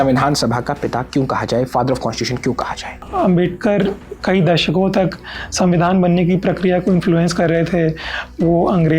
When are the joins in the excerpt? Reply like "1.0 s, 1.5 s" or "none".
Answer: 3.0 s